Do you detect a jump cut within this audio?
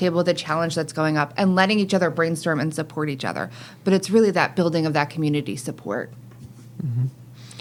no; 0 cuts

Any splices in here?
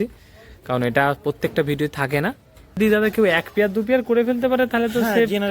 yes; 1 cut; at 2.8 s

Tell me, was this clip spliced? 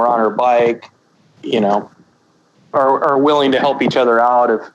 yes; 2 cuts; at 0.9 s, 2.0 s

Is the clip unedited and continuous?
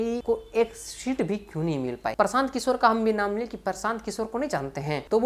no; 1 cut; at 2.1 s

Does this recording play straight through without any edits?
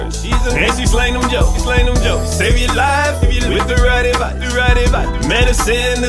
yes; 0 cuts

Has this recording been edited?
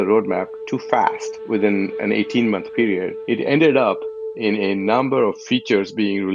no; 0 cuts

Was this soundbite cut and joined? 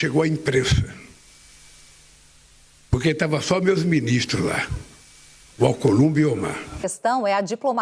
yes; 1 cut; at 6.8 s

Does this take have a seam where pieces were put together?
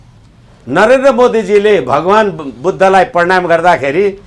no; 0 cuts

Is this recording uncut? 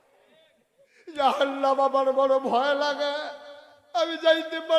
no; 1 cut; at 1.1 s

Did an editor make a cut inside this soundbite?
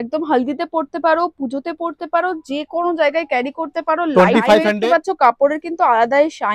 yes; 1 cut; at 4.7 s

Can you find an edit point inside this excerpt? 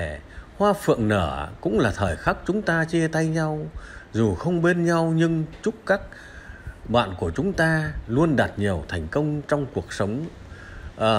no; 0 cuts

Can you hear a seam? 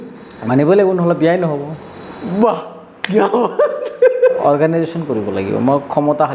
yes; 1 cut; at 4.4 s

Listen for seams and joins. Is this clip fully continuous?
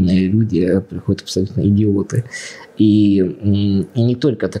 yes; 0 cuts

